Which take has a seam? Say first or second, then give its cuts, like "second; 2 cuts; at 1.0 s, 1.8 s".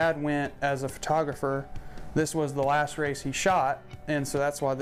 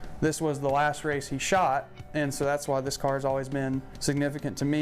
second; 1 cut; at 3.9 s